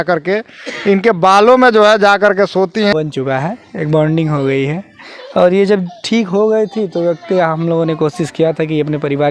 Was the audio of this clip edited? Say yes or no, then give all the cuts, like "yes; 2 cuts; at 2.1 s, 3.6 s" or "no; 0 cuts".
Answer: yes; 1 cut; at 2.9 s